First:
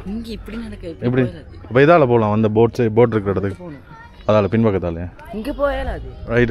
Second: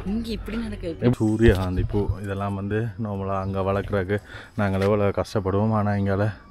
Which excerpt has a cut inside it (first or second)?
second